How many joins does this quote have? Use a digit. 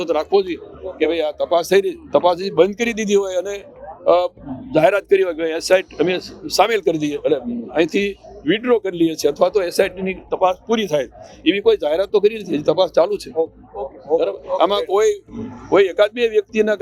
0